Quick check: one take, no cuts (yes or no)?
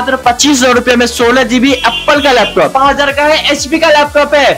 no